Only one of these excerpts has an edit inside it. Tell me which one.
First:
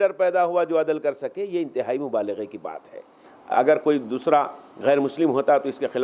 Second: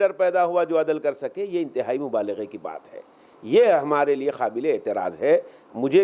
first; 1 cut; at 3.3 s

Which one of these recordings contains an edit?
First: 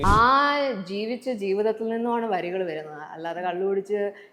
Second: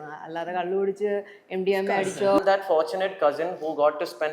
second; 1 cut; at 2.4 s

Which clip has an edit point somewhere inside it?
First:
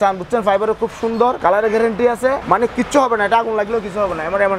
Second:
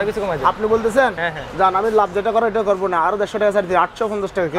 first; 2 cuts; at 1.4 s, 2.4 s

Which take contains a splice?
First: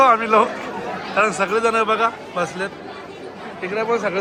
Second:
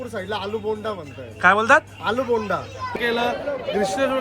second; 1 cut; at 2.9 s

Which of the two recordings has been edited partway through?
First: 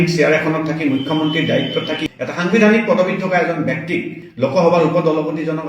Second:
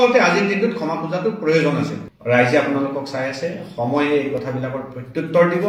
first; 1 cut; at 2.0 s

